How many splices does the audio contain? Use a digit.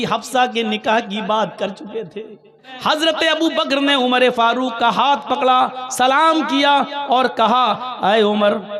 1